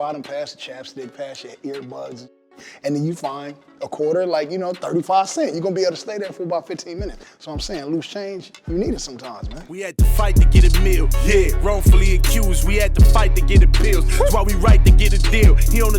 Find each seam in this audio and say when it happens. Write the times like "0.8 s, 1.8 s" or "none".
9.7 s